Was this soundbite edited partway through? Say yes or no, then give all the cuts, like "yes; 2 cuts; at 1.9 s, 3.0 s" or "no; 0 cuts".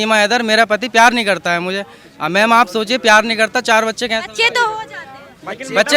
no; 0 cuts